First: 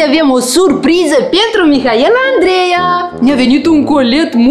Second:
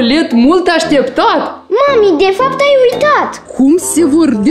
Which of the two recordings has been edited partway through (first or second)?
second